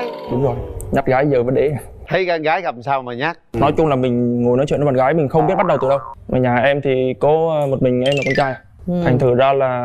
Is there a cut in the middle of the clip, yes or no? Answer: yes